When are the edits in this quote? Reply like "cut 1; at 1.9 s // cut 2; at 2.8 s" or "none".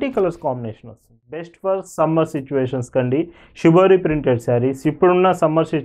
cut 1; at 1.5 s